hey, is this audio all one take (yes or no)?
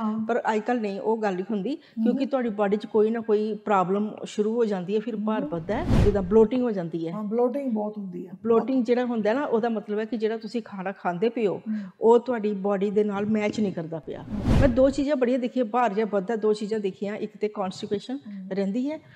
no